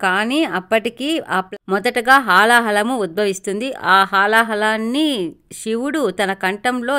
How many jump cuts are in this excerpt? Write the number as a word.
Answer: one